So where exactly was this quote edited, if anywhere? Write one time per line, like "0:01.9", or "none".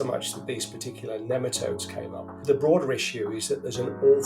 0:02.4